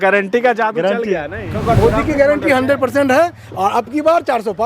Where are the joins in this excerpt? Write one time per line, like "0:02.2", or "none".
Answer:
0:01.4